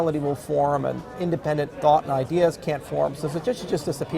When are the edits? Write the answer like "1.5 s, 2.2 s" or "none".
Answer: none